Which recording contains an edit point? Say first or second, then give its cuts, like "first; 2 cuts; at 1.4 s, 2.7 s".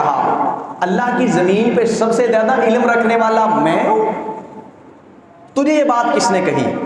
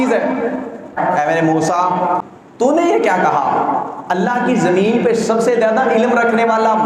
second; 2 cuts; at 1.0 s, 2.4 s